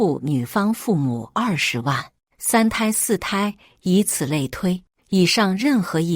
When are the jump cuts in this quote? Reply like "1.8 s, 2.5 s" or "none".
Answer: 4.9 s